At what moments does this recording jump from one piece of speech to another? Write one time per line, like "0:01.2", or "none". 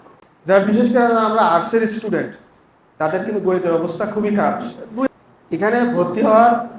0:05.1